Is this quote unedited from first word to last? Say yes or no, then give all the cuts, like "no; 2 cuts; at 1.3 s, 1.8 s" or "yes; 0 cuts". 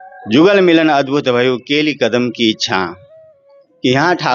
yes; 0 cuts